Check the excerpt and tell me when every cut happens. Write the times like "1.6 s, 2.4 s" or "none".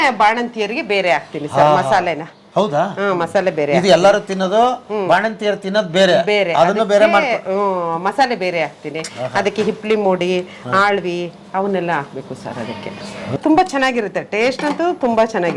13.4 s

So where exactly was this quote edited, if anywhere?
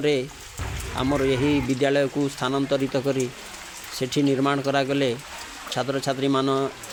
none

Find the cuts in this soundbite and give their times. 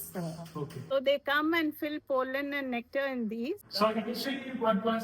0.9 s, 3.7 s

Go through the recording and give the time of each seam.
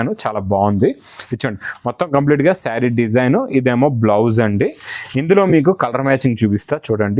none

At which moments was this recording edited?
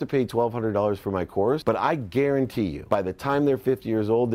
1.6 s, 2.8 s

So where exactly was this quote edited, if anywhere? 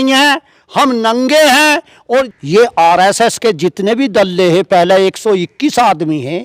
2.4 s

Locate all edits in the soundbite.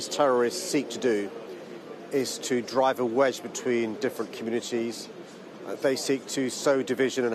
none

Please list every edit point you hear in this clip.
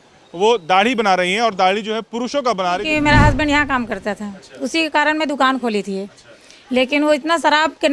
2.8 s

